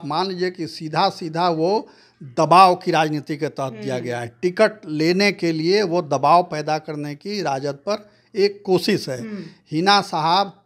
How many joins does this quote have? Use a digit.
0